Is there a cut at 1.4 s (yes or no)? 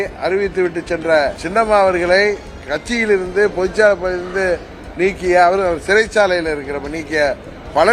yes